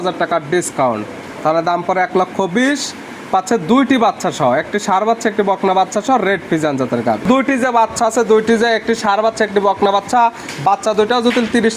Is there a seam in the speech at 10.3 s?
no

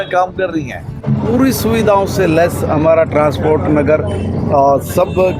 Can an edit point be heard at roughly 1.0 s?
yes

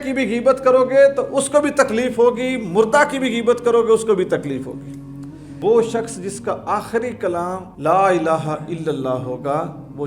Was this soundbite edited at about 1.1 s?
no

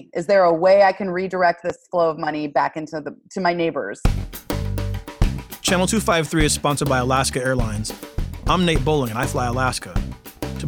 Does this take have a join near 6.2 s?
no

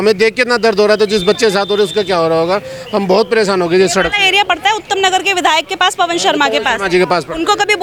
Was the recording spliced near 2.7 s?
no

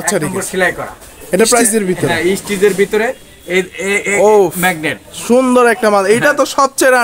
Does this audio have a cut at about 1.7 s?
yes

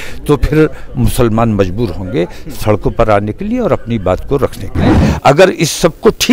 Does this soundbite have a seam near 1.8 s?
no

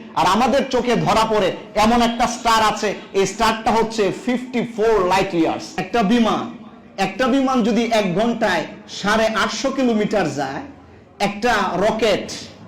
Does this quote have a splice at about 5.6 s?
yes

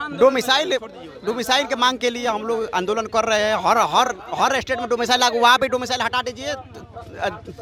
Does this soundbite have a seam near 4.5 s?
no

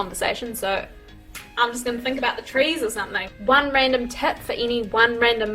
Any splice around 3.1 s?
yes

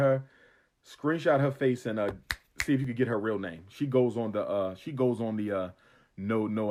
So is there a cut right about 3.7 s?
no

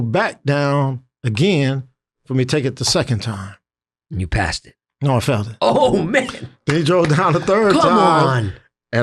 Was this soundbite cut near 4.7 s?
no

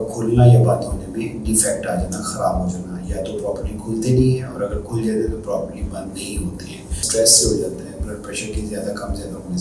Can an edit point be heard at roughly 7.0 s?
yes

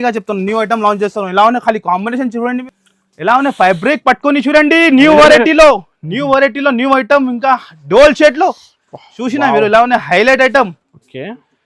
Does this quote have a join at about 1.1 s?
no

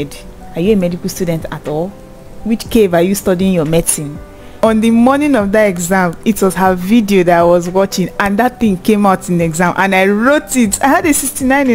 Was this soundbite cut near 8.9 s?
no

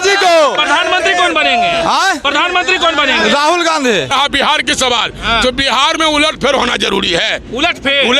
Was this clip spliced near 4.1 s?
yes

